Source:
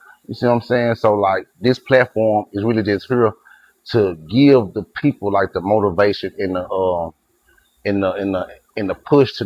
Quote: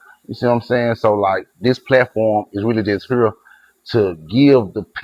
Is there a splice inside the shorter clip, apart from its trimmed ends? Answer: no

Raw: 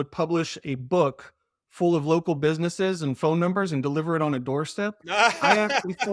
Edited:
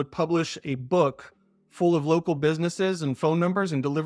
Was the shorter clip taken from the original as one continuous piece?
yes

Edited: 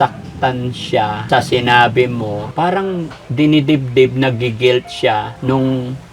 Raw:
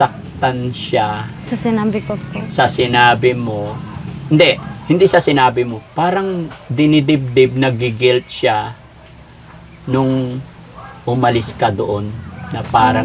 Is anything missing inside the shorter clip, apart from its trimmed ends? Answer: yes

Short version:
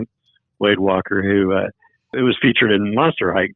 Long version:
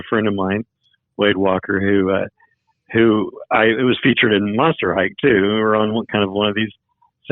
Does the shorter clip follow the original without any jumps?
no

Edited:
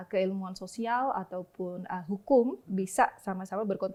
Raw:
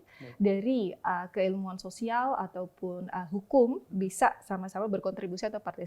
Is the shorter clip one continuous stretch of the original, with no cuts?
yes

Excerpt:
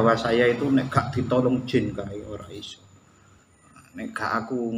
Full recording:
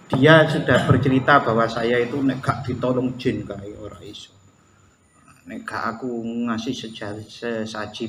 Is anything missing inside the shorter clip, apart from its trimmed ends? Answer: no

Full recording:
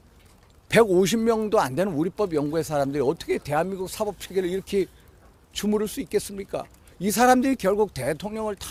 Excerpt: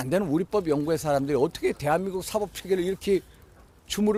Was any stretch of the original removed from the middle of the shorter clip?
no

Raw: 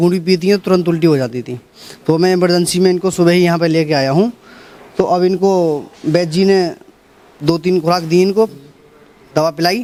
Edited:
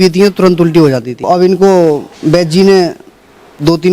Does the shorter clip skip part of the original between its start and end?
yes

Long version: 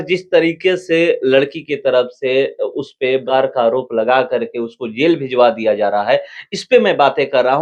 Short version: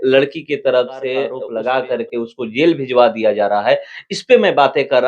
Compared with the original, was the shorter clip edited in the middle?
yes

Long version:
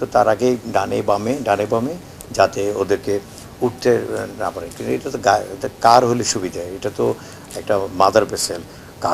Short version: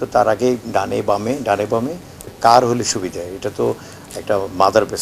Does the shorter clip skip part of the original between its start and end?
yes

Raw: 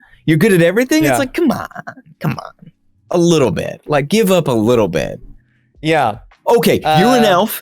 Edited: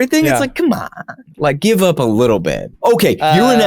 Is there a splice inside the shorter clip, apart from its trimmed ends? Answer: yes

